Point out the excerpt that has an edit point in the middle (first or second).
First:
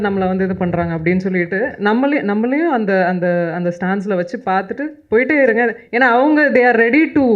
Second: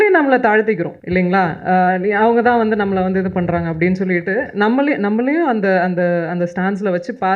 second